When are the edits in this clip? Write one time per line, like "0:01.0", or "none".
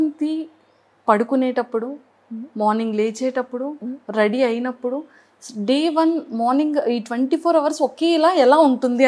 none